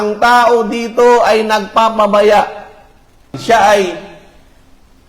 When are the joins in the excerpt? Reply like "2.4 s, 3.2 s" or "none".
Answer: 3.4 s